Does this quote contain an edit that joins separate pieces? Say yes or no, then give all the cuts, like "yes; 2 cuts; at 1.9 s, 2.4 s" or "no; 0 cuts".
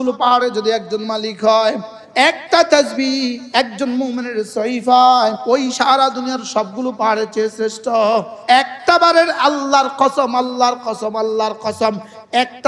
yes; 3 cuts; at 1.9 s, 5.4 s, 8.3 s